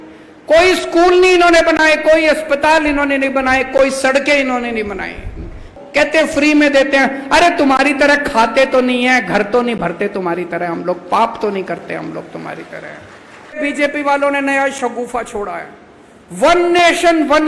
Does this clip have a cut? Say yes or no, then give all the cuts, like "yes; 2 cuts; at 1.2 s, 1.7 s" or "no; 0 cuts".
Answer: yes; 1 cut; at 13.6 s